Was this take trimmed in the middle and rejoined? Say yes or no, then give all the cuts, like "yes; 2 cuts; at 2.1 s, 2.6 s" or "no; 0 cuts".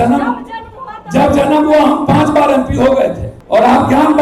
yes; 1 cut; at 3.3 s